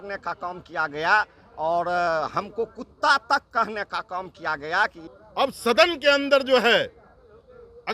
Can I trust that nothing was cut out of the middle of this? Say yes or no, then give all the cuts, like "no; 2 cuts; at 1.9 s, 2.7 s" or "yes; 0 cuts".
no; 1 cut; at 5.1 s